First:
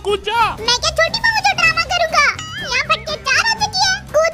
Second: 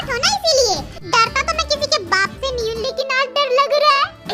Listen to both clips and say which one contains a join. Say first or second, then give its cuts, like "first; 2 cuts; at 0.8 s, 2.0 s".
second; 1 cut; at 0.9 s